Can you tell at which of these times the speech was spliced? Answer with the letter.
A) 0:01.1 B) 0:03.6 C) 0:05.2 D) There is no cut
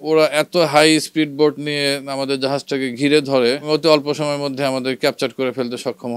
B